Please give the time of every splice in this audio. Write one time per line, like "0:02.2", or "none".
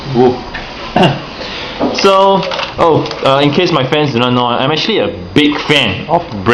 0:02.6